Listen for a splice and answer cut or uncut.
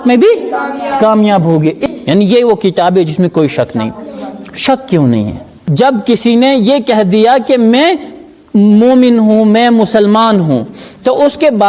cut